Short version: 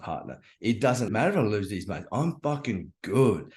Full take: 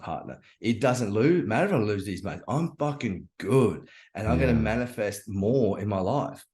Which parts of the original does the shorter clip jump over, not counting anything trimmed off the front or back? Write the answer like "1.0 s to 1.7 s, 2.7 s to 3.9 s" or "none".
1.1 s to 1.5 s